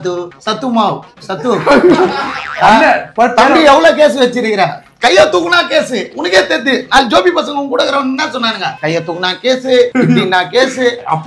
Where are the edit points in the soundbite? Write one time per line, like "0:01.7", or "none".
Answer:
0:02.7